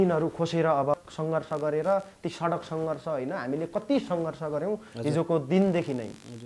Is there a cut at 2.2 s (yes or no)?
no